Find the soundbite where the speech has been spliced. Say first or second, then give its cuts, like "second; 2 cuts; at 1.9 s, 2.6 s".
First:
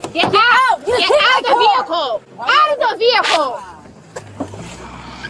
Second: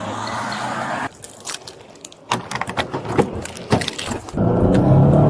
second; 2 cuts; at 1.1 s, 4.3 s